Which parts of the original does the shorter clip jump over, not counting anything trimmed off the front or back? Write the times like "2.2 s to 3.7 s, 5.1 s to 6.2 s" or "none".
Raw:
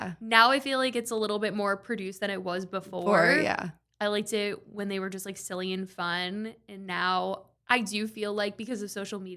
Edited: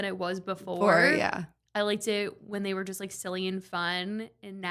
none

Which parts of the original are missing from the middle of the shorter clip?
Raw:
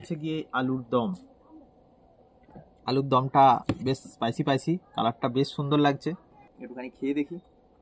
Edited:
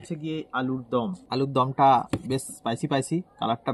1.2 s to 2.8 s

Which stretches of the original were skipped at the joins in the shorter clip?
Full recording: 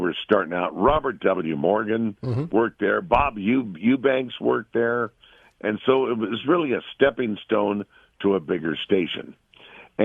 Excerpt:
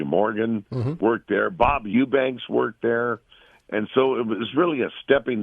3.3 s to 3.7 s

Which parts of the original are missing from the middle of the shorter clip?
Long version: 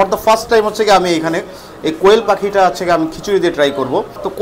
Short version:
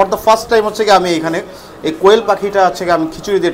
none

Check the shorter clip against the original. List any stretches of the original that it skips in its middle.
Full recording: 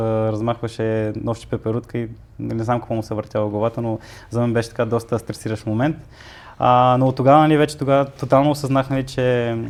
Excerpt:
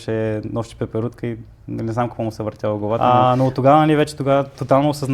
3.7 s to 6.6 s

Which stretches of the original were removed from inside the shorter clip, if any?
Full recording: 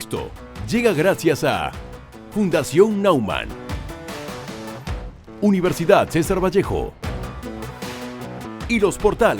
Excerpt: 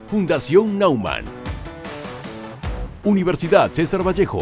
5.2 s to 5.3 s

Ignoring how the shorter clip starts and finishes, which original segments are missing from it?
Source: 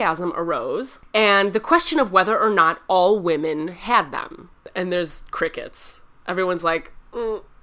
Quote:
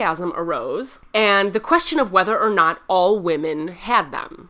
none

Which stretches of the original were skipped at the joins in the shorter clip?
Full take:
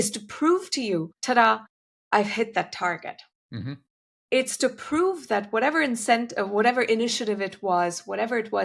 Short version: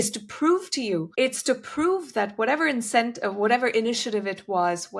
1.1 s to 4.2 s

